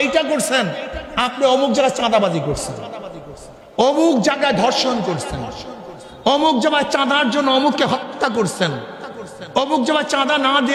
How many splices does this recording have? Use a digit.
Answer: 0